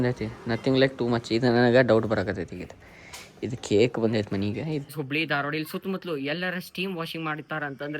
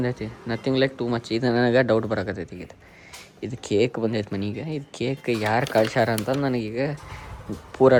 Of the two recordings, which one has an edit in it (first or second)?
first